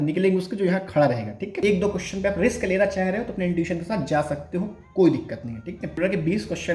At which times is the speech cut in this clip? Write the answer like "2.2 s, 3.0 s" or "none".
1.6 s, 6.0 s